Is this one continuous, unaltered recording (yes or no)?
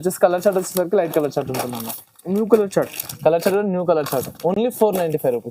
yes